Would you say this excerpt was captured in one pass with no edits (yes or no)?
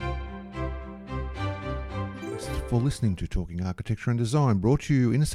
no